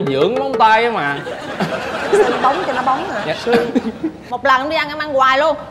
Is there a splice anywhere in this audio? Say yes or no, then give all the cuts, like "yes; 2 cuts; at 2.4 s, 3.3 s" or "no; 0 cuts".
yes; 1 cut; at 4.2 s